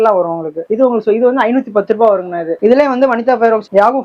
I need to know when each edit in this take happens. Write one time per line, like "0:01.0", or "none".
none